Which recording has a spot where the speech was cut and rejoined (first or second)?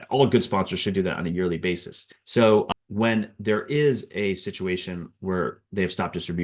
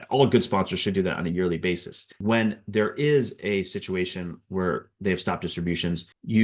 second